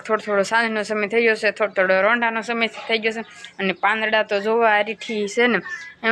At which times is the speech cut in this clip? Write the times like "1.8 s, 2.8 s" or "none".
none